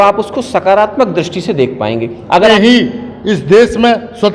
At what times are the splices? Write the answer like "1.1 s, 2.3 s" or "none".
2.5 s

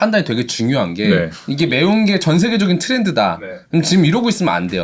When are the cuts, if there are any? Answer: 1.4 s

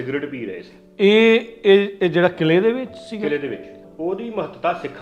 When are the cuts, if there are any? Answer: 3.8 s

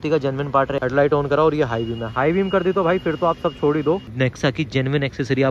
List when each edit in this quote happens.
0.8 s, 4.1 s

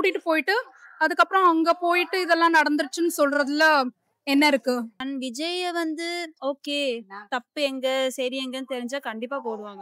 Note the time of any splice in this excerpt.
5.0 s

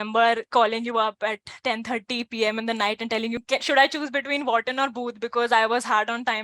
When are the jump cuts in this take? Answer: 3.4 s

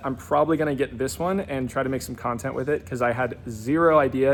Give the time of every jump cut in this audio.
none

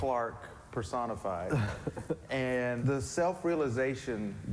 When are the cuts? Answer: 2.8 s

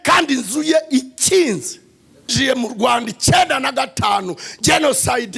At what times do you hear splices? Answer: 2.3 s

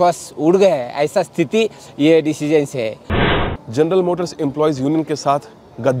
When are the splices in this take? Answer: 3.1 s

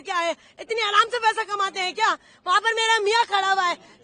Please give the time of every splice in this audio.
none

